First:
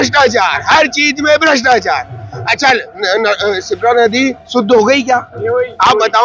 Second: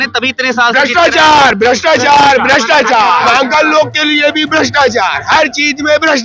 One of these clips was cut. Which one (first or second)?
second